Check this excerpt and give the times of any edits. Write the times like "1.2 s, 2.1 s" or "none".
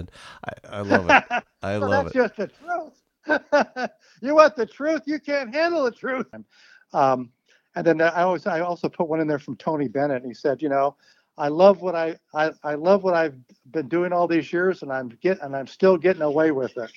6.4 s